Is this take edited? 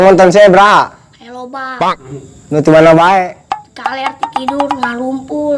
no; 0 cuts

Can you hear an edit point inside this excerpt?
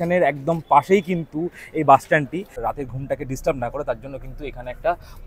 yes; 1 cut; at 2.6 s

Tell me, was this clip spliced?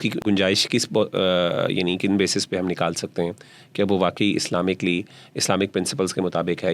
no; 0 cuts

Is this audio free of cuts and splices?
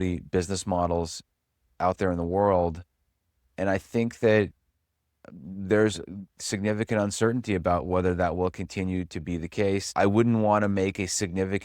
no; 1 cut; at 9.9 s

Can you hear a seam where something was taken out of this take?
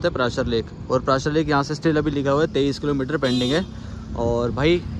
no; 0 cuts

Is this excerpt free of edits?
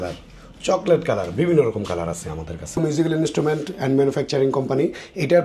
no; 1 cut; at 2.8 s

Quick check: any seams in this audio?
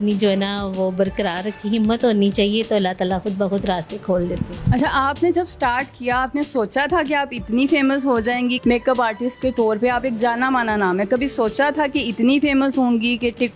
no; 0 cuts

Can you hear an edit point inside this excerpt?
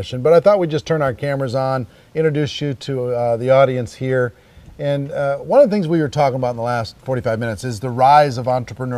no; 0 cuts

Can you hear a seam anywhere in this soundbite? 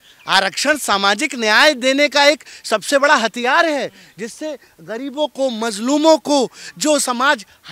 no; 0 cuts

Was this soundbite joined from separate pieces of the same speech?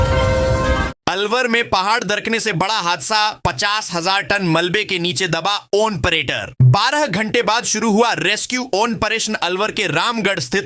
yes; 1 cut; at 0.9 s

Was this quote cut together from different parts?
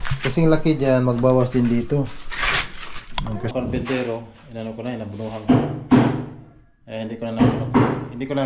yes; 1 cut; at 3.5 s

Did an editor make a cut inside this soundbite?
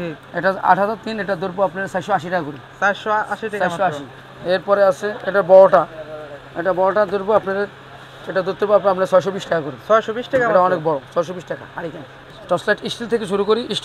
yes; 1 cut; at 12.3 s

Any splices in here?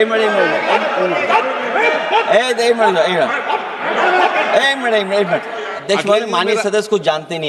yes; 1 cut; at 5.8 s

